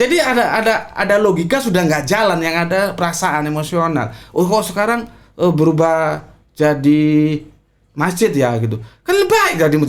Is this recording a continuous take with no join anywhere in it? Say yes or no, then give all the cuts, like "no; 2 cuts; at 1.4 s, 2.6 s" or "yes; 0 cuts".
yes; 0 cuts